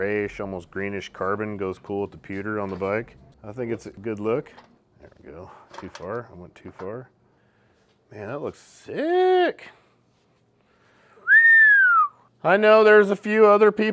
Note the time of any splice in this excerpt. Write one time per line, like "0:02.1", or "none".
none